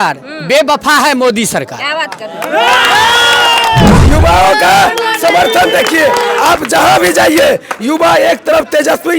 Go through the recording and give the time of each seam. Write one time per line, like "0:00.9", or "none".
0:04.0

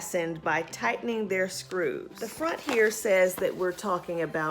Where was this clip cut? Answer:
0:02.2

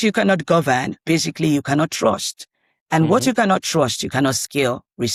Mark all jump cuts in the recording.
none

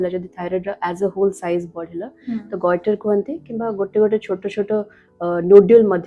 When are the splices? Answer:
none

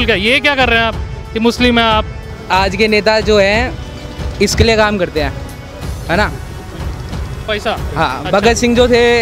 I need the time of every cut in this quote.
0:02.3

